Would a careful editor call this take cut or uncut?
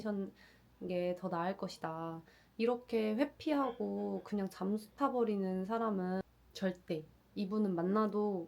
cut